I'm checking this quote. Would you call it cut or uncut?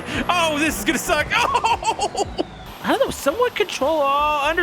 cut